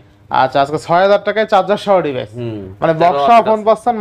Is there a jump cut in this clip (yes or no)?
no